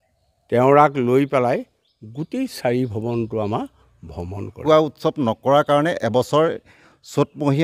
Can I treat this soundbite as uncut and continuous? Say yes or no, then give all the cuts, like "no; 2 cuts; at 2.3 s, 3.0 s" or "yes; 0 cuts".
no; 1 cut; at 4.6 s